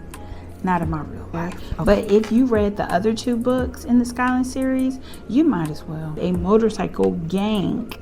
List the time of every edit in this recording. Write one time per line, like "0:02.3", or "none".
0:01.5
0:06.1